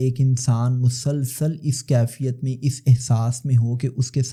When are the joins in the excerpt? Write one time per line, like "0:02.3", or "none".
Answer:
none